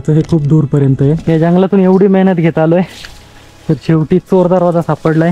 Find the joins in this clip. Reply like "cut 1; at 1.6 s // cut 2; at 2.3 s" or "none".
cut 1; at 1.2 s